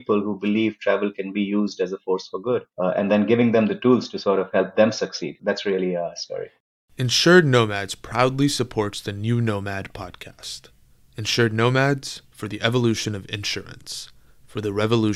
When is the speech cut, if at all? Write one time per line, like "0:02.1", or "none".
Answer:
0:06.5